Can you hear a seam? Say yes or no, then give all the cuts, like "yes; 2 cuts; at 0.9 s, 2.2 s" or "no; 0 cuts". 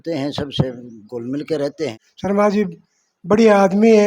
yes; 1 cut; at 2.0 s